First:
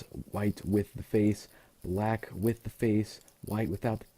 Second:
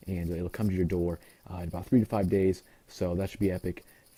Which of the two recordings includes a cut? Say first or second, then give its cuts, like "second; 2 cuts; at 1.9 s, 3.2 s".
first; 1 cut; at 1.2 s